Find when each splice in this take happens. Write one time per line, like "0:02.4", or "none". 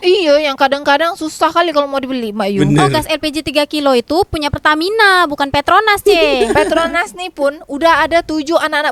none